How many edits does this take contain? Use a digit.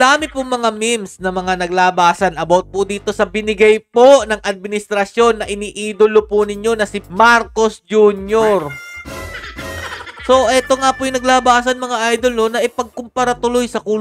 0